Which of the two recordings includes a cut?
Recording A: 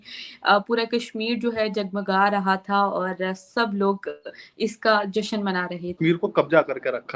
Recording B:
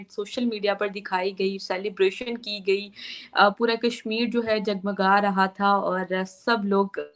A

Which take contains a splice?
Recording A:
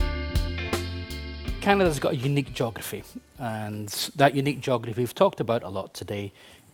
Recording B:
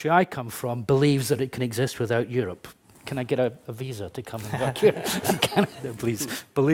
A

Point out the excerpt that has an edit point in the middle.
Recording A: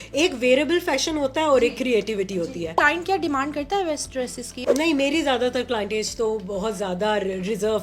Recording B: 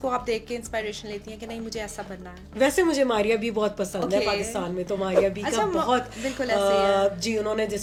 A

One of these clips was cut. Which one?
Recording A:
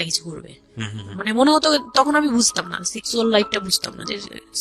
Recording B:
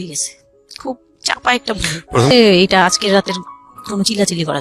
B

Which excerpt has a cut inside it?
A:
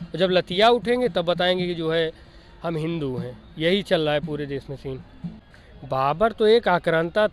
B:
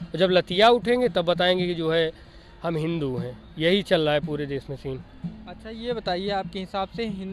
A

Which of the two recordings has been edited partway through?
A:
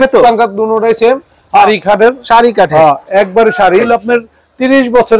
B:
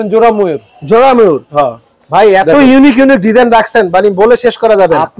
A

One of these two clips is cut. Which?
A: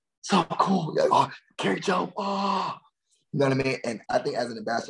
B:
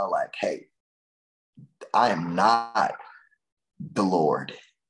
A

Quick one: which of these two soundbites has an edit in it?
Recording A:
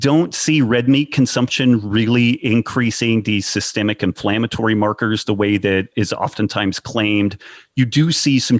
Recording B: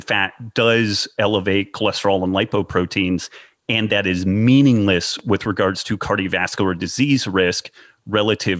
A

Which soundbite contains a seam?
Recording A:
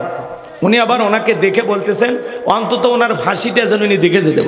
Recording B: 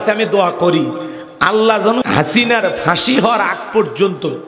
B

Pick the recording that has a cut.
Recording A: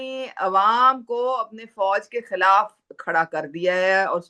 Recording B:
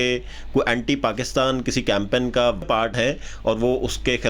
B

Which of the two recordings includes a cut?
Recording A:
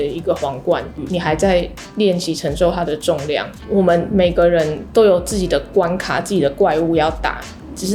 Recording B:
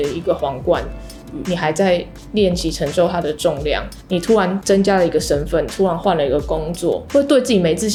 A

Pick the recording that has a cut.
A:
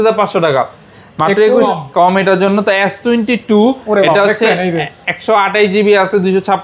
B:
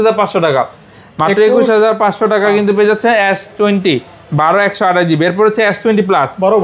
A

